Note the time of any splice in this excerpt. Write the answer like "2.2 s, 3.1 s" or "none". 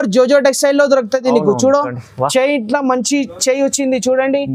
none